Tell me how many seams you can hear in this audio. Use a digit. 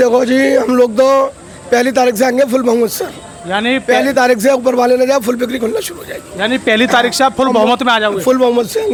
0